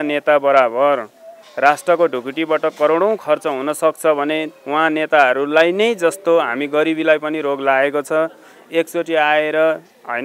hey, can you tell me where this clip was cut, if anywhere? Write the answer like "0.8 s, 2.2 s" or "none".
none